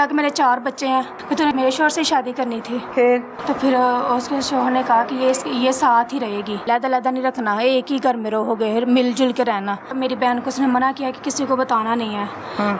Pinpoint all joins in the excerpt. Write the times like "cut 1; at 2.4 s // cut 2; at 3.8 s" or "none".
cut 1; at 1.4 s // cut 2; at 3.3 s // cut 3; at 6.6 s // cut 4; at 9.9 s